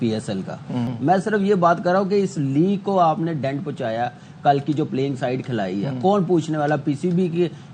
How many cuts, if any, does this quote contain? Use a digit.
1